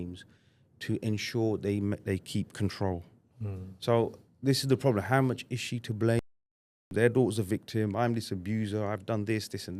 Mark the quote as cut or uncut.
cut